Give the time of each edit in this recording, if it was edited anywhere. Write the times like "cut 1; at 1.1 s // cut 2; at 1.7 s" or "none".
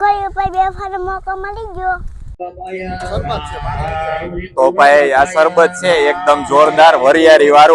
cut 1; at 2.4 s